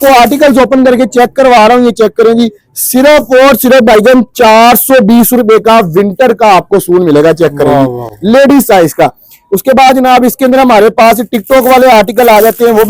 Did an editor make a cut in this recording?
no; 0 cuts

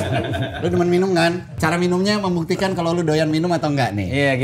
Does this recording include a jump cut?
yes; 1 cut; at 1.5 s

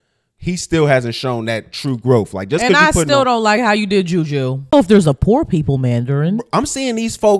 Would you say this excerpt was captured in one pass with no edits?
no; 1 cut; at 4.7 s

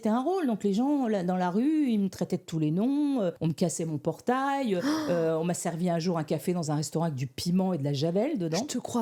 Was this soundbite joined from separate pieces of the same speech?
no; 0 cuts

